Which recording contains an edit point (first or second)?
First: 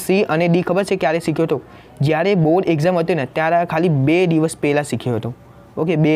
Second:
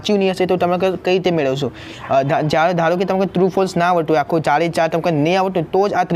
second